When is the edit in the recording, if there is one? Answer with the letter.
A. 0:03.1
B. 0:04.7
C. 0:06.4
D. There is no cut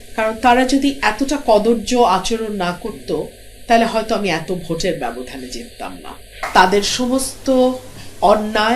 C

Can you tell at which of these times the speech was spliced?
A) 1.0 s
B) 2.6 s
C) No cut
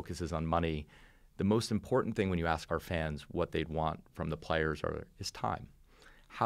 B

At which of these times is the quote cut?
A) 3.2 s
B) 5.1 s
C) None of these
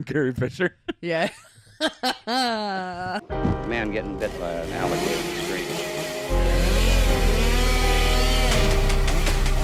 A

